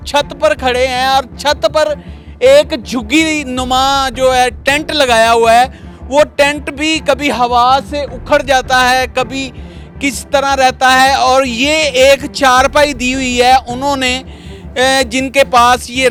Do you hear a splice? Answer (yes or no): no